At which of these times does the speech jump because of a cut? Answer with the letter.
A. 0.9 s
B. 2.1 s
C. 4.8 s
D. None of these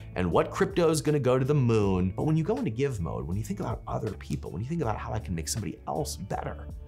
B